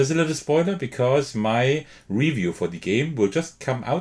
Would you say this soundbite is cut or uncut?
uncut